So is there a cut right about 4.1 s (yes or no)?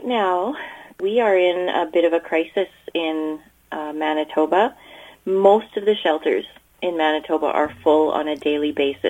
no